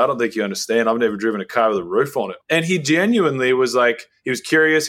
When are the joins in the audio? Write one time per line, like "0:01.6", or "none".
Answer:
0:02.3